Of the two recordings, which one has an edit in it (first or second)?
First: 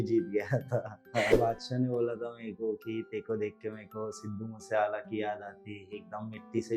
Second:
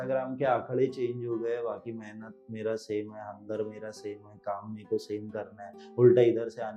first